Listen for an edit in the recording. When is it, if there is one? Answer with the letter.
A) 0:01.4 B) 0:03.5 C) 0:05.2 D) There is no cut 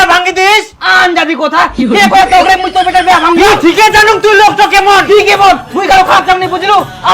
B